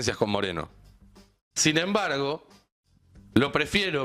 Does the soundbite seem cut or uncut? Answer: uncut